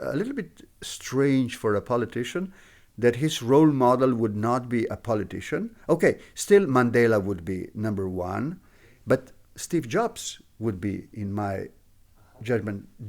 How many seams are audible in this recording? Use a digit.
0